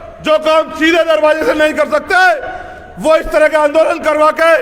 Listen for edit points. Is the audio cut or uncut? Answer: uncut